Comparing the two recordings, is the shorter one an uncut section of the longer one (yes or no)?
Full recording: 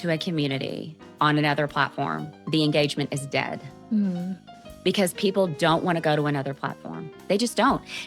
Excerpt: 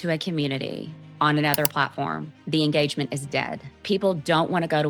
no